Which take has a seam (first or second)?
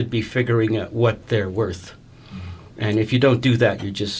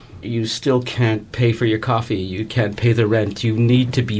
second